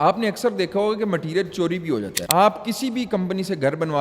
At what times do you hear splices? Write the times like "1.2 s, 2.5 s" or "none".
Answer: 2.2 s